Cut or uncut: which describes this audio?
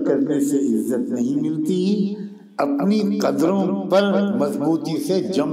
uncut